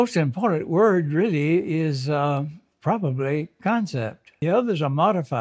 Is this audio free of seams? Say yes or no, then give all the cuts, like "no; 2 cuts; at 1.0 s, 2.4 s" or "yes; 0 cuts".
no; 1 cut; at 4.4 s